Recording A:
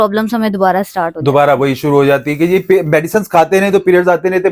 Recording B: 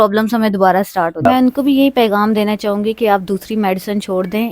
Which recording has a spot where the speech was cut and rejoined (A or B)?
B